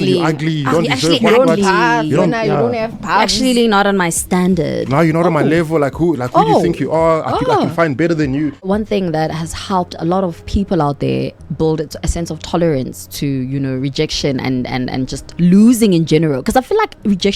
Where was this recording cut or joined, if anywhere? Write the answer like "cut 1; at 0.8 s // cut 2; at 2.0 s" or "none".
cut 1; at 8.6 s